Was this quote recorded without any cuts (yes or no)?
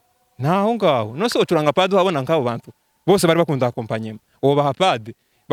yes